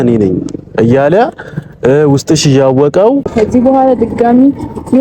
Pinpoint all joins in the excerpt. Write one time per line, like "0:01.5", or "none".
0:03.3